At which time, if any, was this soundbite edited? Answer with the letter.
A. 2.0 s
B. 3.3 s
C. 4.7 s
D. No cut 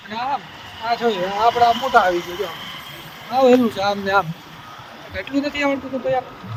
D